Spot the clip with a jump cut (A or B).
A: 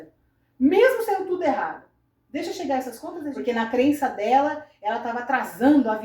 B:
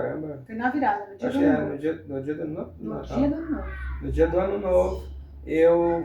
A